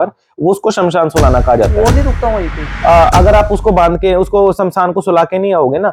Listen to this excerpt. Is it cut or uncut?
uncut